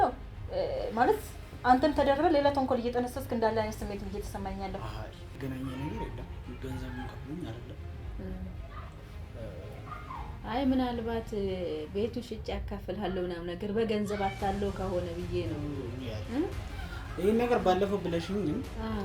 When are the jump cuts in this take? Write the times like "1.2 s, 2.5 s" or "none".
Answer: 5.4 s